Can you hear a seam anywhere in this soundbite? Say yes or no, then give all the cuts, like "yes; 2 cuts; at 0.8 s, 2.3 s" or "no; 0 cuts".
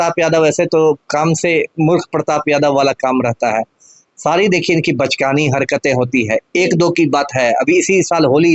no; 0 cuts